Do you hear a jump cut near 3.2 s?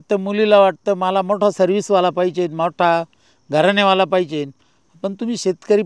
no; 0 cuts

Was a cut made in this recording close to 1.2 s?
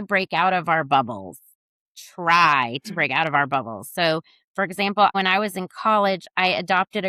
no; 1 cut; at 5.1 s

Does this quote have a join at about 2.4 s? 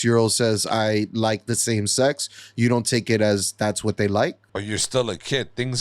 no; 1 cut; at 4.4 s

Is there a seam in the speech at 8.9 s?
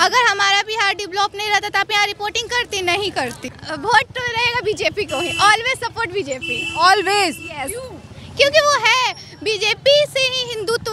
no; 1 cut; at 3.6 s

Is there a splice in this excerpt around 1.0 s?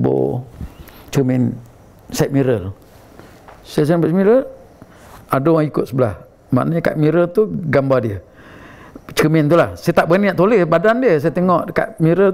yes; 1 cut; at 1.0 s

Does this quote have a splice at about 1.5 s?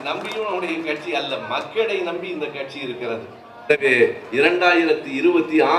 no; 1 cut; at 3.7 s

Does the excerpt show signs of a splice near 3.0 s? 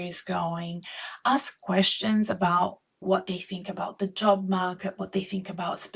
yes; 1 cut; at 3.0 s

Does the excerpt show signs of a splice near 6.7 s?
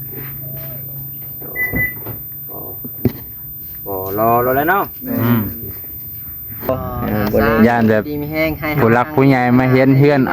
yes; 1 cut; at 6.7 s

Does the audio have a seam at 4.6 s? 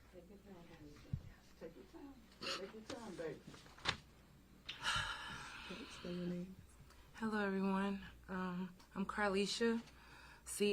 yes; 1 cut; at 4.6 s

